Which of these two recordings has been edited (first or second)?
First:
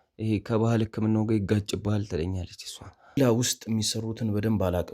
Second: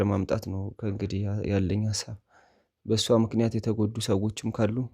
first